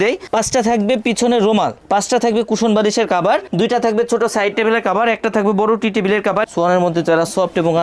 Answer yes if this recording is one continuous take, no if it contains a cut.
no